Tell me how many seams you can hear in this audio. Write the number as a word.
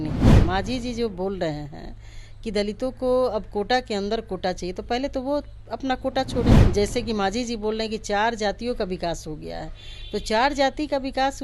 one